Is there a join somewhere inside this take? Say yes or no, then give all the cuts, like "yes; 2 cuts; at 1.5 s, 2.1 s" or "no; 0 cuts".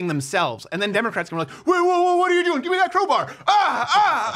no; 0 cuts